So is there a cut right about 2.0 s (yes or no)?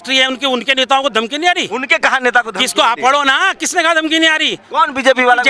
no